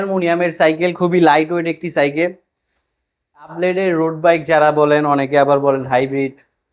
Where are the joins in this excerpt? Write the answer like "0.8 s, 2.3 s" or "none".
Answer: 3.5 s